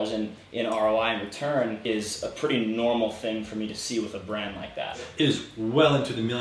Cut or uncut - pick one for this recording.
cut